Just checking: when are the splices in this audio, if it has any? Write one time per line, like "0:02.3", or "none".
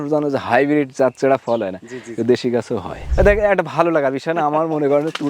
0:03.0